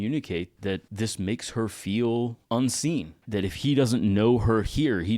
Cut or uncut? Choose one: cut